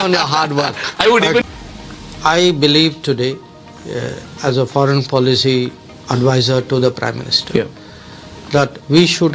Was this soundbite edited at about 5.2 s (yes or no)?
no